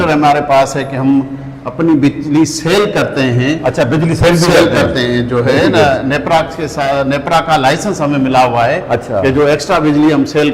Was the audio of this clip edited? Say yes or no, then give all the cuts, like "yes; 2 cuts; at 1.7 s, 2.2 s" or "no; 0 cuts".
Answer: no; 0 cuts